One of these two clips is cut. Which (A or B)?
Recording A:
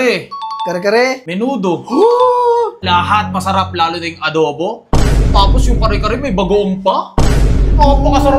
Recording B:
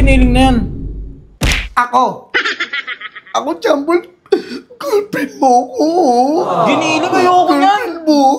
A